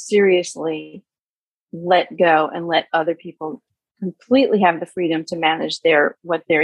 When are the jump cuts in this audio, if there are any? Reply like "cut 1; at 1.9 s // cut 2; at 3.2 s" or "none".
none

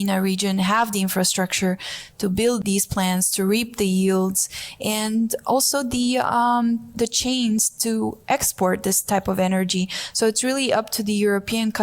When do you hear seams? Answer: cut 1; at 2.6 s

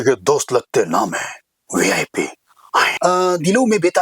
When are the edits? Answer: cut 1; at 2.9 s

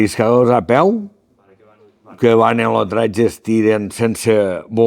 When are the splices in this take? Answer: none

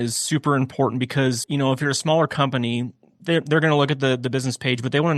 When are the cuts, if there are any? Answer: cut 1; at 1.4 s

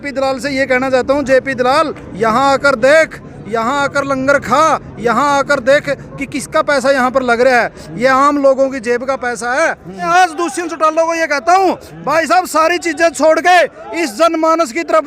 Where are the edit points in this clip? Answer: cut 1; at 10.1 s

